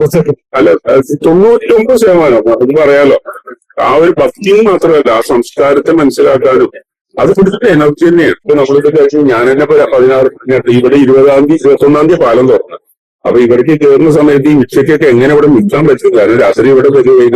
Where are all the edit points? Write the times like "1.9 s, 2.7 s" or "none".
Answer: 8.4 s